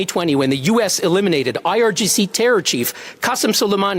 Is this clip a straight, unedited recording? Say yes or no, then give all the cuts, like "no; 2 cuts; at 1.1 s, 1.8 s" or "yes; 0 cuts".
yes; 0 cuts